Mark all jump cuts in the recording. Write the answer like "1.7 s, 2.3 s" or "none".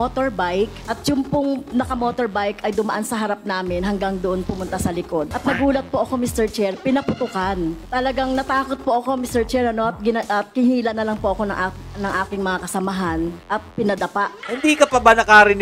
5.3 s, 7.8 s, 13.6 s, 14.4 s